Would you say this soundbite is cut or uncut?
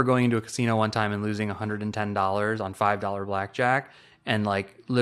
uncut